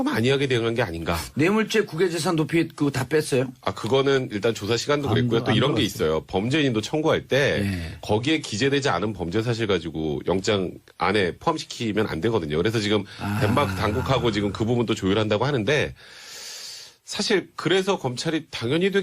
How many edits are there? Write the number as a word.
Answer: one